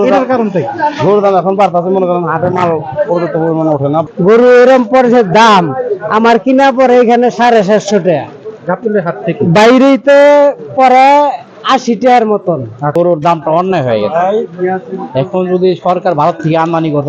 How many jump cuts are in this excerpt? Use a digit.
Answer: 2